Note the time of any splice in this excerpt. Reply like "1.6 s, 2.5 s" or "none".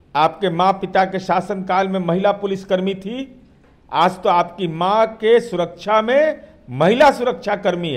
none